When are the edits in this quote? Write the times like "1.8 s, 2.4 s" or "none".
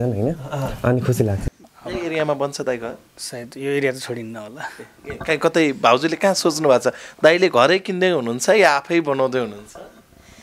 1.5 s